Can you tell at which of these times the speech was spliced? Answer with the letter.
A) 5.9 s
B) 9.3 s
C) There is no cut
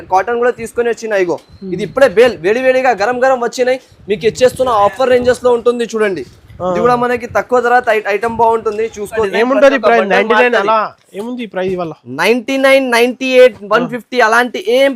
B